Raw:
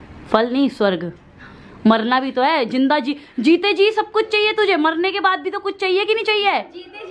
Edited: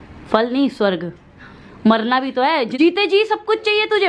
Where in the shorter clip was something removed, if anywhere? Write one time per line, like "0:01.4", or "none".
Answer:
0:02.7

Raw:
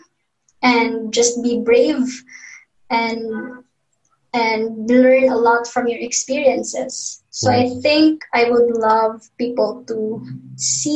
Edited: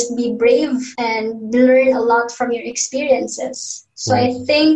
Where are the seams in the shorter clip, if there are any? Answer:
0:00.9

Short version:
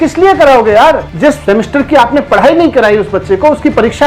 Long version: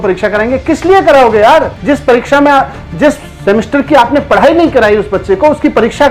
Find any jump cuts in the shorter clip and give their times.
0:01.2

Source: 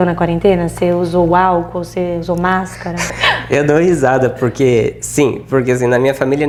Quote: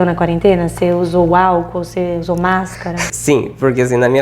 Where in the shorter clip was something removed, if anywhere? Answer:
0:03.1

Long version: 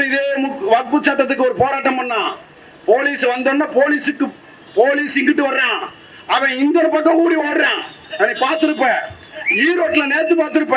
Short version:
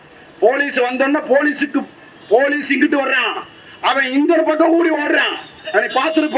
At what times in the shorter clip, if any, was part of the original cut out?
none

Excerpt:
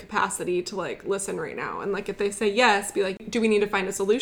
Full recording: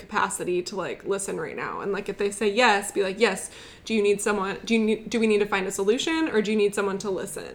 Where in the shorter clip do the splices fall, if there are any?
0:03.2

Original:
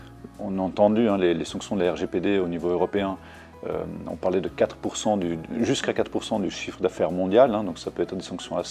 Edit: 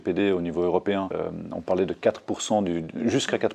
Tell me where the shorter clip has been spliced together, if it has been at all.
0:01.1

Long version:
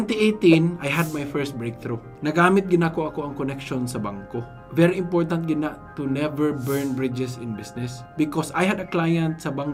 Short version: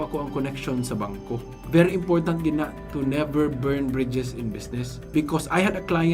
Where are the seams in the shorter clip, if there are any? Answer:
none

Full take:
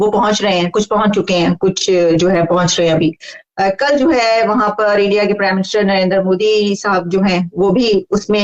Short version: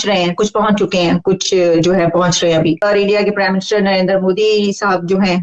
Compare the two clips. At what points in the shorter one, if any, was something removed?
0:02.8

